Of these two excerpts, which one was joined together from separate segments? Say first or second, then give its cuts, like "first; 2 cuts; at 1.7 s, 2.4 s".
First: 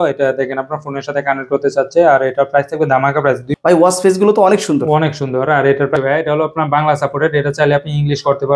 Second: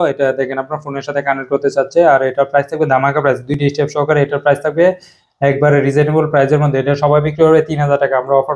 first; 2 cuts; at 3.5 s, 5.9 s